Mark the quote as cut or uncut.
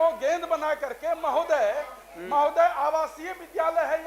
uncut